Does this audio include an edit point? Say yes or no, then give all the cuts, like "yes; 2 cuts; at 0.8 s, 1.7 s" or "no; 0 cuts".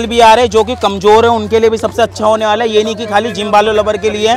no; 0 cuts